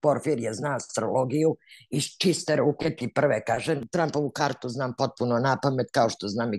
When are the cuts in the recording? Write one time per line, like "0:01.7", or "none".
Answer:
0:03.8